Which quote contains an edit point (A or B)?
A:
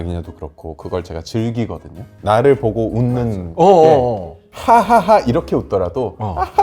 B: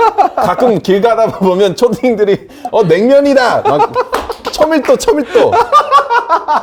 A